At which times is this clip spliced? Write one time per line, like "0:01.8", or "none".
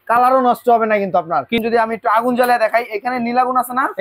0:01.6